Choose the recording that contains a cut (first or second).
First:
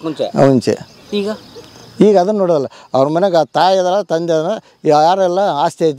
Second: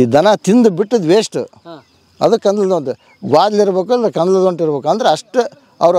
first